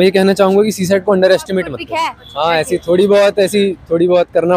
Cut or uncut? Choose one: cut